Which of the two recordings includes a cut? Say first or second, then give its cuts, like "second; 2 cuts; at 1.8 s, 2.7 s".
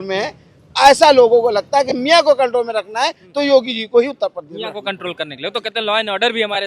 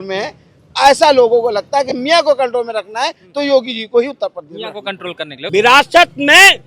second; 1 cut; at 5.4 s